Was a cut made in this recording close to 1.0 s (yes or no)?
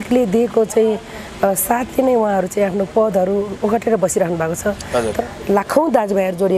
no